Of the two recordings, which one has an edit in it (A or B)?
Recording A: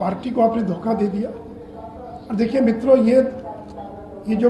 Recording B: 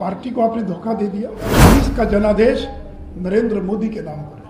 B